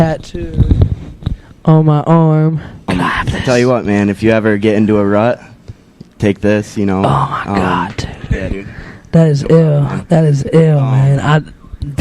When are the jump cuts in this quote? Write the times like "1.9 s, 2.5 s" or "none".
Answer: 2.6 s